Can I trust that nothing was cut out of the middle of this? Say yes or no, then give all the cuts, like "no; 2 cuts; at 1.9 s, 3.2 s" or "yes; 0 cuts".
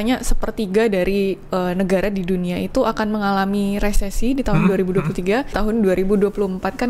no; 1 cut; at 5.6 s